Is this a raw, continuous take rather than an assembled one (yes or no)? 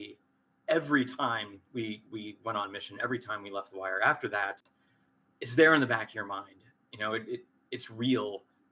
yes